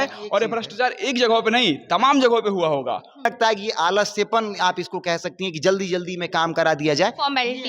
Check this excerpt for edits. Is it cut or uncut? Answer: cut